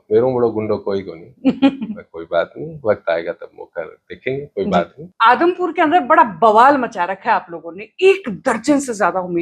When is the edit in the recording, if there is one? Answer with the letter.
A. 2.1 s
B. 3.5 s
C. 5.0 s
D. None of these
C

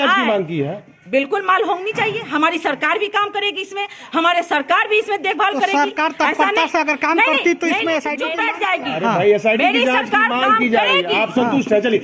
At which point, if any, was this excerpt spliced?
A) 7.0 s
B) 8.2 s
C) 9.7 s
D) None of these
B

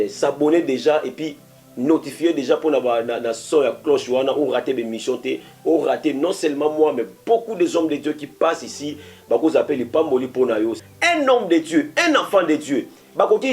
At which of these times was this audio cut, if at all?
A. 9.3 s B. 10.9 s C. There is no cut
B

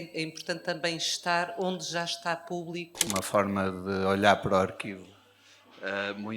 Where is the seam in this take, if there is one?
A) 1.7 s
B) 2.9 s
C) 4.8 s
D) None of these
B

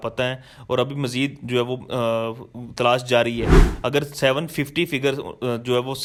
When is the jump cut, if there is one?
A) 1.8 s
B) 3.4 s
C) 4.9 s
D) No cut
D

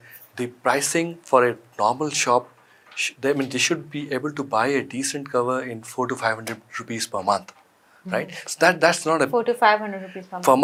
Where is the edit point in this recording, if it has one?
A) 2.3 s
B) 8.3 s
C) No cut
C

